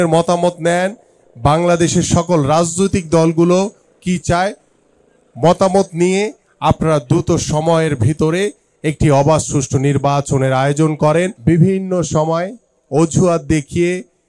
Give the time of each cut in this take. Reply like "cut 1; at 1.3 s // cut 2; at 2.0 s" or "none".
cut 1; at 11.4 s